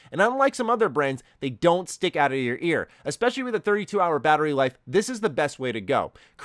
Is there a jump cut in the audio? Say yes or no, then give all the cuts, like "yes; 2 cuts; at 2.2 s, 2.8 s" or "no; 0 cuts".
no; 0 cuts